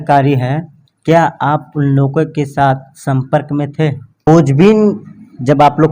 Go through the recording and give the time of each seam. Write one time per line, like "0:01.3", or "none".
0:04.1